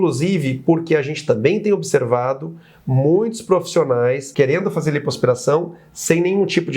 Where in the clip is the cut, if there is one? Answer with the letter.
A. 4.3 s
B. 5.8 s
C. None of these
A